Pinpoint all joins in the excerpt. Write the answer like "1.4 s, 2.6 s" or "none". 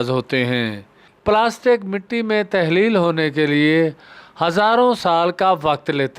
1.1 s